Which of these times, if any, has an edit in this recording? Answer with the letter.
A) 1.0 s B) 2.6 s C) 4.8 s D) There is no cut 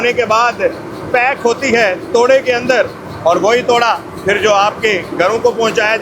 D